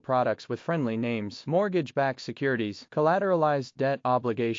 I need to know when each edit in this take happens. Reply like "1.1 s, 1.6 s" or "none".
none